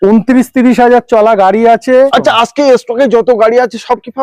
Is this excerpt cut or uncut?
cut